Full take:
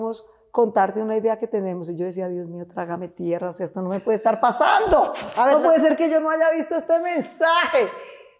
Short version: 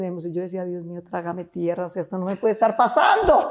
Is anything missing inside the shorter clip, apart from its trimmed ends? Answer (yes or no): no